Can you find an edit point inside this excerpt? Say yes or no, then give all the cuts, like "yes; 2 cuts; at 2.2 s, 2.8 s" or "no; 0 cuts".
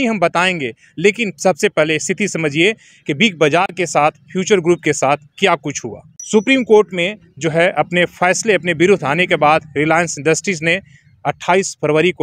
yes; 1 cut; at 6.1 s